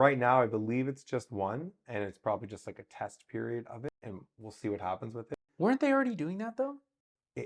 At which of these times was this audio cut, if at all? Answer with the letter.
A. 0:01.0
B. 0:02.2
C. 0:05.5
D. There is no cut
C